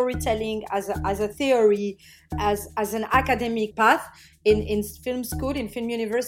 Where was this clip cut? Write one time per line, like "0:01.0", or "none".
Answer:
0:02.3
0:03.7